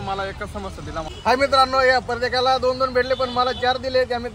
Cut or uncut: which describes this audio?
cut